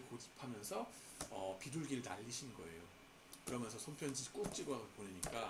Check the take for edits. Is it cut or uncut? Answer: uncut